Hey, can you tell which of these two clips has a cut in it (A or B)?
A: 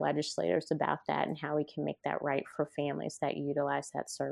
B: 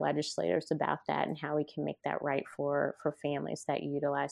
A